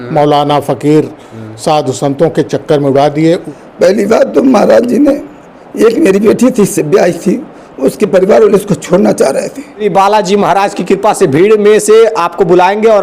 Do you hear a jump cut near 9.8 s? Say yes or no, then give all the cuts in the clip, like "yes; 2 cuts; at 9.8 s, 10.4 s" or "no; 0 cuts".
yes; 2 cuts; at 3.5 s, 9.8 s